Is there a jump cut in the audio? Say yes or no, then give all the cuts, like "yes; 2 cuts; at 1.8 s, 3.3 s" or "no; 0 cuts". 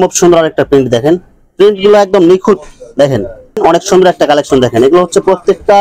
yes; 1 cut; at 3.5 s